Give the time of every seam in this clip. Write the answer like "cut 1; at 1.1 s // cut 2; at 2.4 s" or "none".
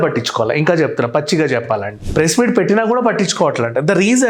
cut 1; at 2.0 s